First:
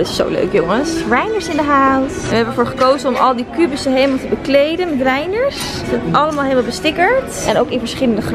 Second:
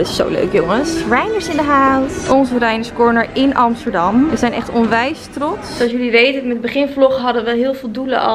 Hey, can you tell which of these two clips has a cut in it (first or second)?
second